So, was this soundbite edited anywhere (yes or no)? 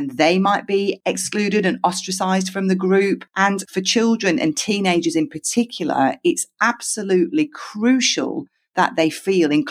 yes